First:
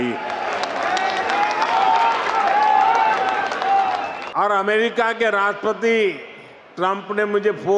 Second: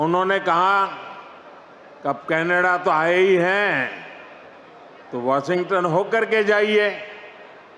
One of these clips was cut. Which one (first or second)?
first